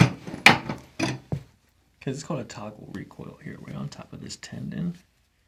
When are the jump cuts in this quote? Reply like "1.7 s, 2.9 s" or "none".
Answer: none

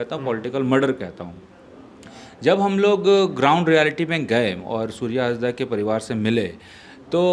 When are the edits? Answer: none

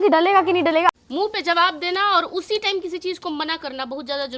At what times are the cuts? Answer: 1.0 s

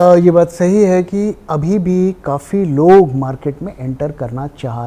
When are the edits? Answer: none

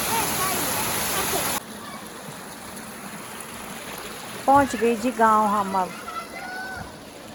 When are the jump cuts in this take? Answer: none

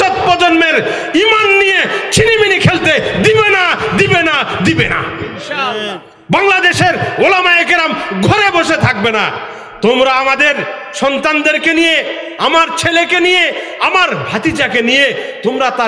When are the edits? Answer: none

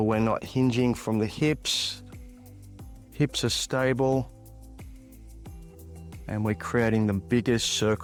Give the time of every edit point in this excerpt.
none

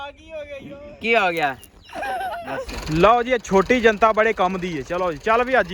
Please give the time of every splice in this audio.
2.8 s

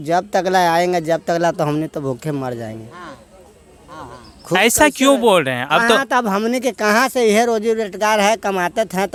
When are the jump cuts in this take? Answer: none

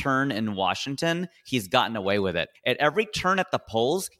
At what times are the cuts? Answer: 2.5 s

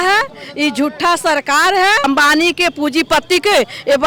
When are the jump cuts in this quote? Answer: 2.0 s

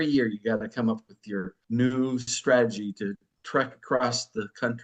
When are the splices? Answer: 1.5 s, 3.3 s

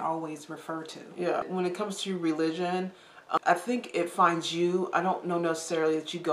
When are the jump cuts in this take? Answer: 1.5 s, 3.4 s

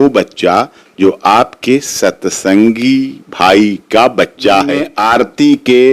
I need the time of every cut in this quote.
4.9 s

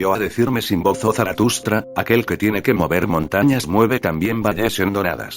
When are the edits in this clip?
0.9 s

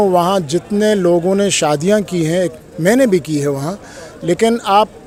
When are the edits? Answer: none

